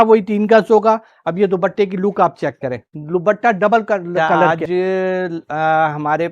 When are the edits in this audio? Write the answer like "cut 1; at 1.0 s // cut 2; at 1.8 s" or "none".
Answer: cut 1; at 4.5 s

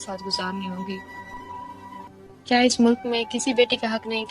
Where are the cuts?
cut 1; at 2.0 s

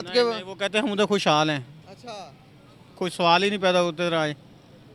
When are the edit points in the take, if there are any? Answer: none

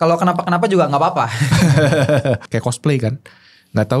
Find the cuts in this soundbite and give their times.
cut 1; at 2.5 s

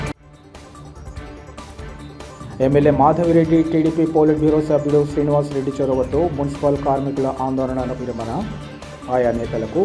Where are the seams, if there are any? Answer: cut 1; at 1.0 s

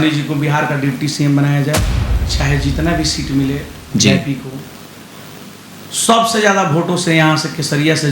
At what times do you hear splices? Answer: cut 1; at 1.9 s

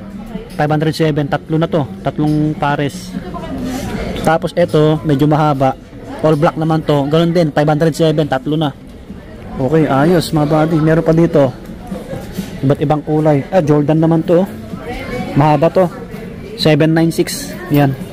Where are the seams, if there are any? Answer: none

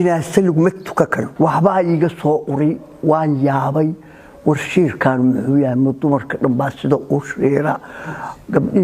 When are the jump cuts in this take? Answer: cut 1; at 1.3 s

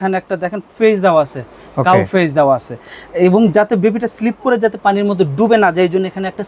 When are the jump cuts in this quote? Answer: none

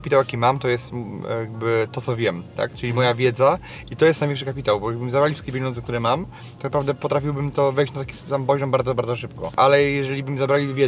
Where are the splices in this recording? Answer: cut 1; at 9.5 s

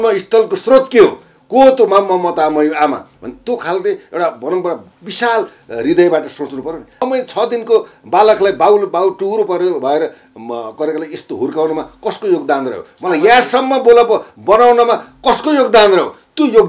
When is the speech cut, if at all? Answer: cut 1; at 7.0 s

